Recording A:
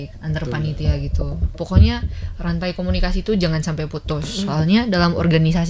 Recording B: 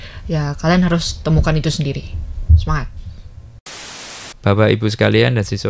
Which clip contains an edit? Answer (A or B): B